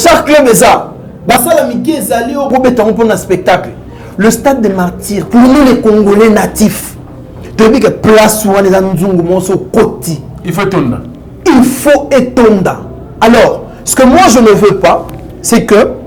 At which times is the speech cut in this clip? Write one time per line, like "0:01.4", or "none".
none